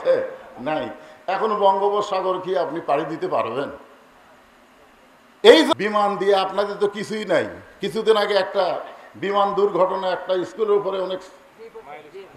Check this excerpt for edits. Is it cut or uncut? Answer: cut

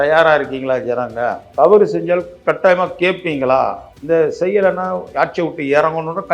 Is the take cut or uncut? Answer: cut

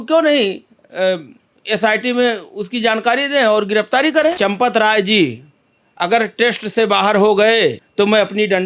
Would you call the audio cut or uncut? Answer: cut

